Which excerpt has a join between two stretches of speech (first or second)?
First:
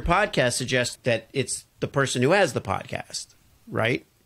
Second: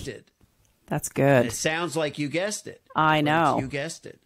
first